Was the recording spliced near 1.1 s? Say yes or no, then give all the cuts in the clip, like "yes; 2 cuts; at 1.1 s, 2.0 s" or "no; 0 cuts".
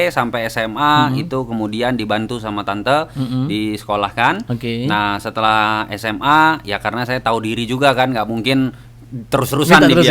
no; 0 cuts